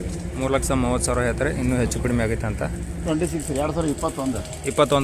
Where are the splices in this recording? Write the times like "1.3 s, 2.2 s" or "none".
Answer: 3.1 s